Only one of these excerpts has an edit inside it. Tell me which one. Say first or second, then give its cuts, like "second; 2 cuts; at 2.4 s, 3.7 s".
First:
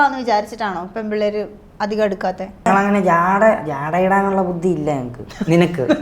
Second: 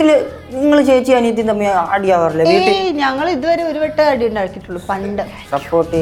first; 1 cut; at 2.7 s